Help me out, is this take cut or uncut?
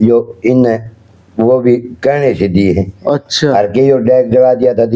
uncut